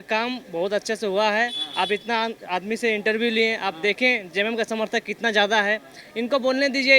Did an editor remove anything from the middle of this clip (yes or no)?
no